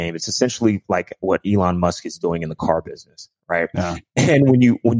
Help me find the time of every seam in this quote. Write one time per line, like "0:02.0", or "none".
none